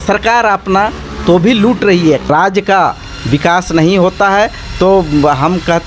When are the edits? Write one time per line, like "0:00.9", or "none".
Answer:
0:02.3